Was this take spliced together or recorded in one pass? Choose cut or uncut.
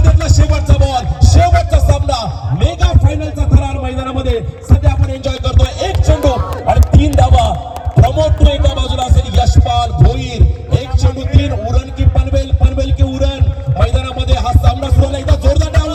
uncut